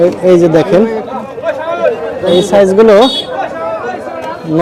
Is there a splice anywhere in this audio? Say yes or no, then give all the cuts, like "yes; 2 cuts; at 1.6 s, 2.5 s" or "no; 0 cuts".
no; 0 cuts